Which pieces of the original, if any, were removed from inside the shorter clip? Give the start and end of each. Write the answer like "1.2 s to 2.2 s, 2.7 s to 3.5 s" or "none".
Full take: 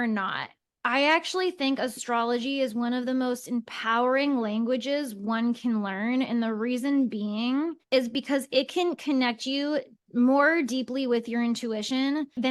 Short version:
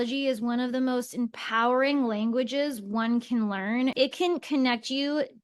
6.3 s to 8.5 s

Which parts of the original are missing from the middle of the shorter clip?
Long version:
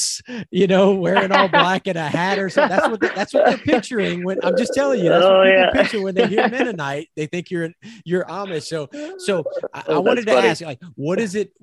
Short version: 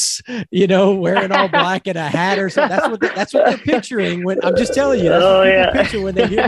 none

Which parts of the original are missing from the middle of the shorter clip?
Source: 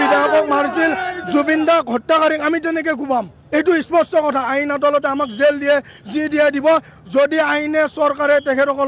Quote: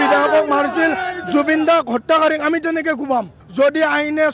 3.4 s to 6.9 s

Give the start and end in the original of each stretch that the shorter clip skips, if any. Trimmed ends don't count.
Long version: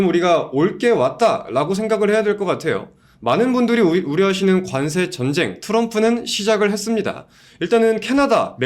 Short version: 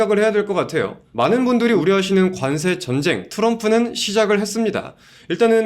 2.9 s to 3.1 s, 3.9 s to 4.1 s

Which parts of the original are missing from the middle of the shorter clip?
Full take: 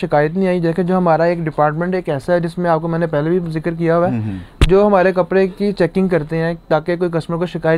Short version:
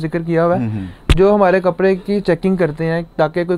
none

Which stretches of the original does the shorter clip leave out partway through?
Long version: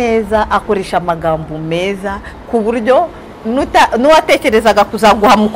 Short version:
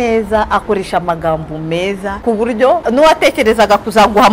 2.2 s to 2.4 s, 3.1 s to 3.9 s

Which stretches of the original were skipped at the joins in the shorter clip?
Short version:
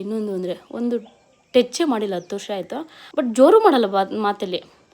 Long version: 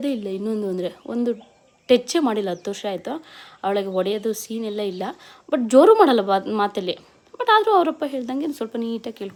3.3 s to 5.3 s

